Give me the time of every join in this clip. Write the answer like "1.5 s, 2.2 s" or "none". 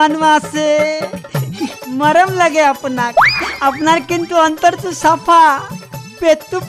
none